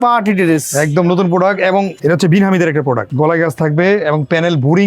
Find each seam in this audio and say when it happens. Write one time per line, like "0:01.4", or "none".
0:01.9
0:03.1

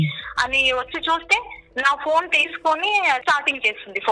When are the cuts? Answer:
0:03.2

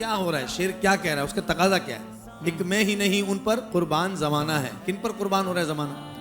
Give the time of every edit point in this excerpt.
0:03.6
0:04.7

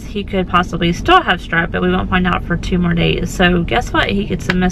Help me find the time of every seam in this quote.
none

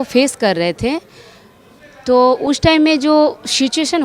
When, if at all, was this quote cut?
none

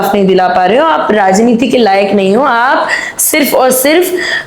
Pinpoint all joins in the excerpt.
none

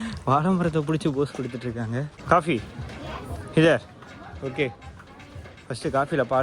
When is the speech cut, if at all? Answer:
0:02.1

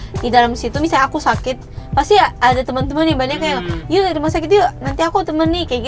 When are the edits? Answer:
none

